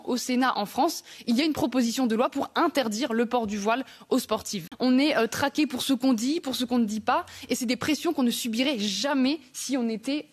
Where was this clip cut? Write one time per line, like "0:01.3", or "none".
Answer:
0:04.6